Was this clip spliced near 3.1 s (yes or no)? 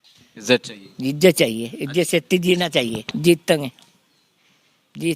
yes